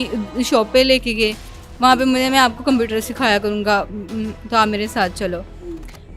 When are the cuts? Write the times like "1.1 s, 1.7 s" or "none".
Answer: none